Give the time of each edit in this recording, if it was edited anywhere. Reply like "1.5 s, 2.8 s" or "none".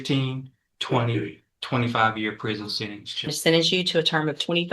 3.3 s